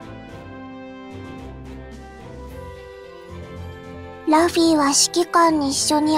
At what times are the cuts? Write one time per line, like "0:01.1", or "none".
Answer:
0:04.2